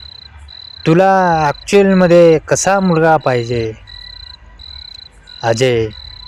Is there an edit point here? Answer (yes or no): no